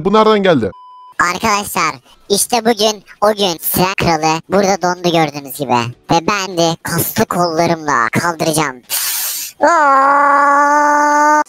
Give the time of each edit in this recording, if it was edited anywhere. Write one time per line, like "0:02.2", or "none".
0:01.0
0:06.5